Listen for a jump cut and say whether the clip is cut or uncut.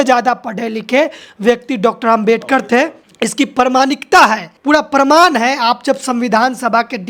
uncut